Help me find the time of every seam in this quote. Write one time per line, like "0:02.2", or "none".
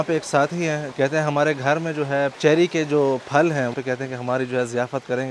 0:00.9
0:02.4
0:03.7